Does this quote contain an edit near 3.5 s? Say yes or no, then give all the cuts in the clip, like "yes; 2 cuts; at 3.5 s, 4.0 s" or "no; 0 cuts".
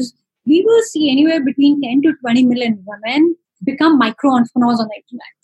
yes; 1 cut; at 3.5 s